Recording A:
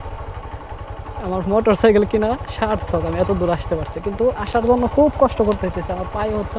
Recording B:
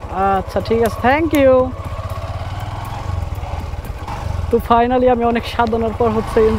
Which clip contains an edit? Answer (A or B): B